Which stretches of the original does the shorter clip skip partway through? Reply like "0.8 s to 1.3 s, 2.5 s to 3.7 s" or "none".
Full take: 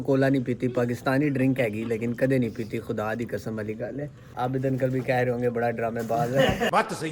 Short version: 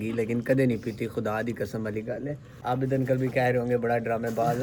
none